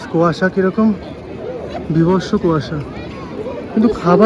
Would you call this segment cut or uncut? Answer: uncut